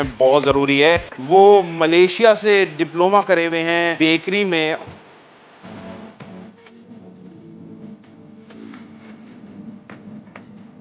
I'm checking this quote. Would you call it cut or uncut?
cut